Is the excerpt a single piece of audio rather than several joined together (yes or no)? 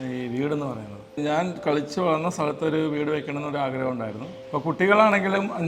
no